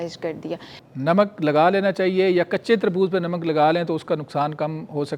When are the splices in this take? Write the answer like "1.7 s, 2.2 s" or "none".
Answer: 0.9 s